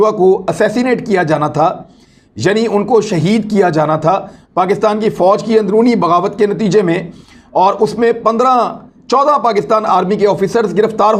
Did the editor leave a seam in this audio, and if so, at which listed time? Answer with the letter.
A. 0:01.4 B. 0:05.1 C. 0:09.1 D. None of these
D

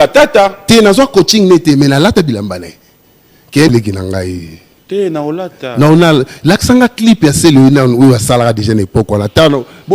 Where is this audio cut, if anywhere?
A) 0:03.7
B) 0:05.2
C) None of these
A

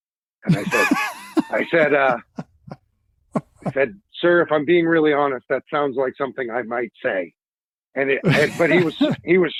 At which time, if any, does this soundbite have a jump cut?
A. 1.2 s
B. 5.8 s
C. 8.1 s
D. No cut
D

